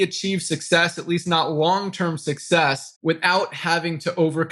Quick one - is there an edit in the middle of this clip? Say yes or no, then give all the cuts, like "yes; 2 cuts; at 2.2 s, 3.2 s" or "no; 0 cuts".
no; 0 cuts